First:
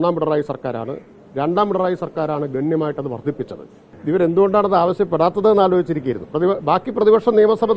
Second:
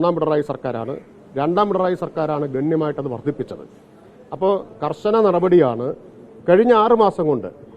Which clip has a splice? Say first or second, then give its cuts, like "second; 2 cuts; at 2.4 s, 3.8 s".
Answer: first; 1 cut; at 4.0 s